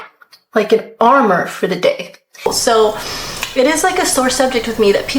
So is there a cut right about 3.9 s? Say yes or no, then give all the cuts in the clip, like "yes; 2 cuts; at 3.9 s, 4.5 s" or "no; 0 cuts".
no; 1 cut; at 2.4 s